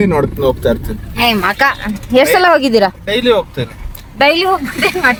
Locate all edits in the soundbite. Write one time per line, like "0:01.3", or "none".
none